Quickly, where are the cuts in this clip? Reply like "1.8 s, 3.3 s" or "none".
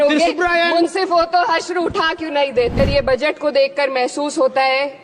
2.8 s